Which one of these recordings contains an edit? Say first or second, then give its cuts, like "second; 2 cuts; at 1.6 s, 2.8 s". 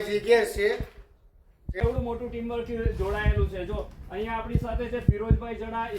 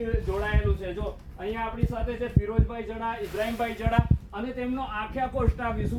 first; 1 cut; at 1.7 s